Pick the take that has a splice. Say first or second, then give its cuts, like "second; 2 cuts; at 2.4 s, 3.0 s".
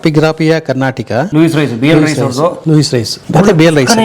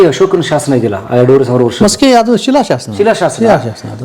first; 2 cuts; at 1.3 s, 2.8 s